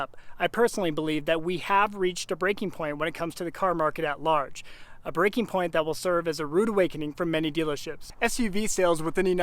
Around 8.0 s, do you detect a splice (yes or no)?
yes